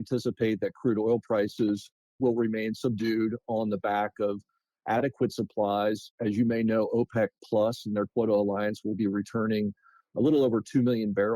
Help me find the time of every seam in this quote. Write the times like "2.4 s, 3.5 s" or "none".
none